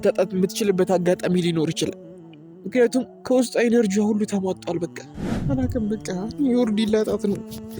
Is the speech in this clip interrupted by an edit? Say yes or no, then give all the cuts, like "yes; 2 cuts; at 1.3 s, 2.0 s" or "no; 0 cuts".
yes; 1 cut; at 5.4 s